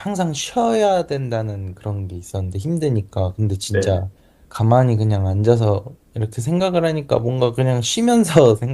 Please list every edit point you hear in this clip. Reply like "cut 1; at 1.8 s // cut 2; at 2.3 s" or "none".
none